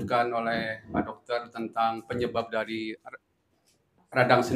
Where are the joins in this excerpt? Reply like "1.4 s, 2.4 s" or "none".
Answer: none